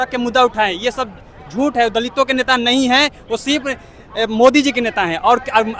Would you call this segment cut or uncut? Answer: uncut